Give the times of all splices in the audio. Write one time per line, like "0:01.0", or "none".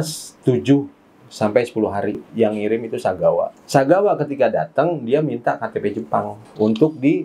0:02.2